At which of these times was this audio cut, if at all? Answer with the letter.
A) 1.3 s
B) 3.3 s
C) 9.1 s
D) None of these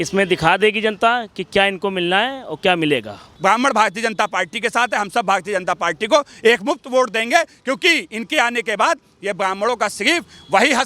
B